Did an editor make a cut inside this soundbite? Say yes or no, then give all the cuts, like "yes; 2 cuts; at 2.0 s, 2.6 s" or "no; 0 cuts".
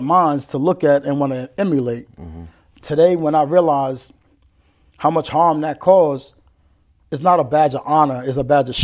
no; 0 cuts